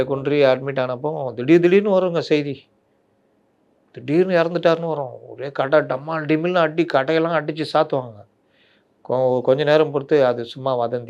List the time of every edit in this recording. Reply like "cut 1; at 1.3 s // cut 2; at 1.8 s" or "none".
none